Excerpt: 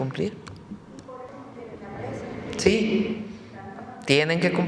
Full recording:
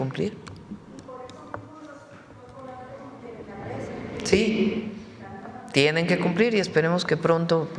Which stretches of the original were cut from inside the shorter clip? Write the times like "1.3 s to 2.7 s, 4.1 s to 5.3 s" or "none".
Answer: 1.3 s to 3.0 s